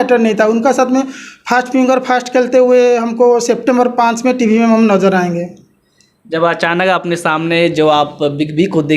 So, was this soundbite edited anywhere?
no; 0 cuts

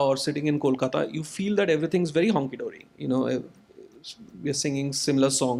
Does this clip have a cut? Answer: no; 0 cuts

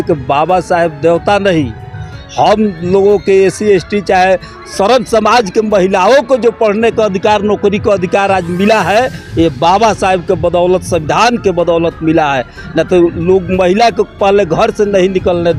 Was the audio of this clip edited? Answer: no; 0 cuts

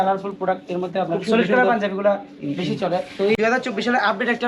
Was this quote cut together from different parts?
yes; 1 cut; at 3.4 s

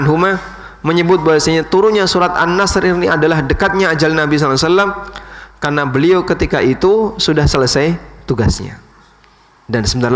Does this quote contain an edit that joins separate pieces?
no; 0 cuts

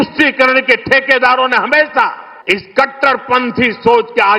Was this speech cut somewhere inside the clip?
yes; 1 cut; at 2.3 s

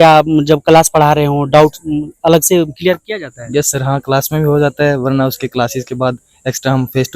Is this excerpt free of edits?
yes; 0 cuts

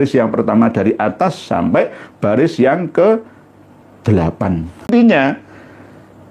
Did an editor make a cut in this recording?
yes; 1 cut; at 4.9 s

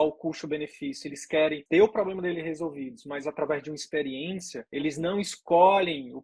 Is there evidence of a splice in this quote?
yes; 2 cuts; at 1.6 s, 4.6 s

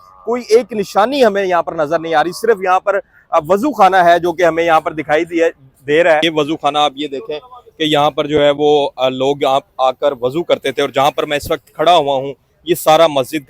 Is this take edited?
yes; 1 cut; at 6.3 s

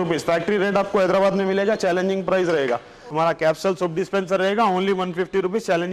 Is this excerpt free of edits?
no; 1 cut; at 3.0 s

